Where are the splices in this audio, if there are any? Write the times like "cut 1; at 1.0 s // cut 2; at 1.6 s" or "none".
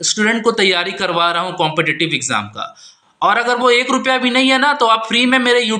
none